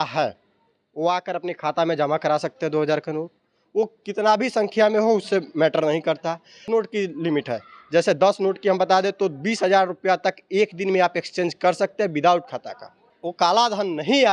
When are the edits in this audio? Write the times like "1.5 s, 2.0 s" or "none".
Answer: 6.6 s, 13.2 s